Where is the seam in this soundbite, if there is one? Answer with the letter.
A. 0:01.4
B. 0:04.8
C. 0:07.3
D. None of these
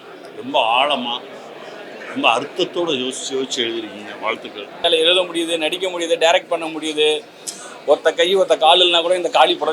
B